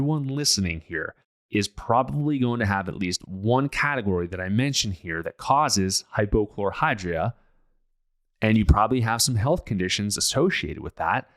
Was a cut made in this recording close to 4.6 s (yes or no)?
no